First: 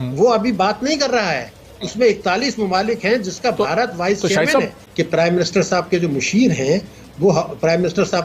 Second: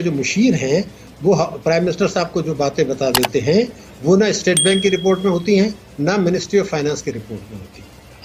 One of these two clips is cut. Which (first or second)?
first